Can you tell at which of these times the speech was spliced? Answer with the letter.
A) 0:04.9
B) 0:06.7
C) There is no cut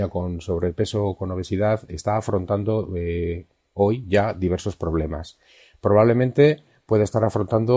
C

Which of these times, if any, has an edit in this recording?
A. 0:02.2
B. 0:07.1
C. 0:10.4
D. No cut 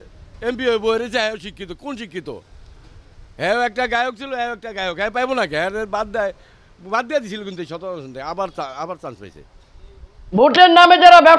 C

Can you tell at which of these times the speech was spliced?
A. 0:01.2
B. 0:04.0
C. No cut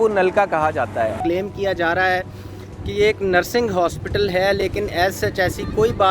A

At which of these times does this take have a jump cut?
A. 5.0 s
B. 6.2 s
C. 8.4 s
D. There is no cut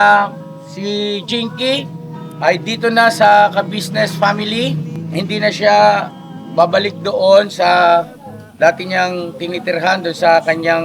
A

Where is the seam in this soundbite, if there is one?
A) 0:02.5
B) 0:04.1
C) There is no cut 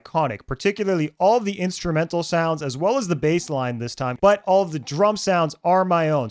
B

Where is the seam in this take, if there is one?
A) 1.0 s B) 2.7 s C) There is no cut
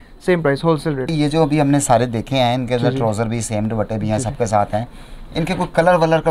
A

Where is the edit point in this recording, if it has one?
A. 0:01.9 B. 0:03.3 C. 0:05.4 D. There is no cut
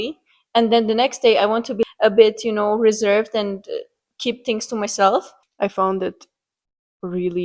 C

